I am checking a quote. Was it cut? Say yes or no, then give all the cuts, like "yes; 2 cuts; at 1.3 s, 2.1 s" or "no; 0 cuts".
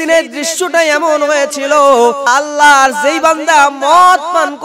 yes; 1 cut; at 2.3 s